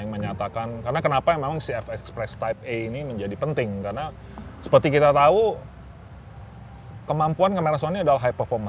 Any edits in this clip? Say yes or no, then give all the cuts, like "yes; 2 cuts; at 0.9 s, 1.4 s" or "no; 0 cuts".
no; 0 cuts